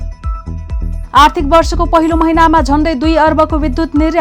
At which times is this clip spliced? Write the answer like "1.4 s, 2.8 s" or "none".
none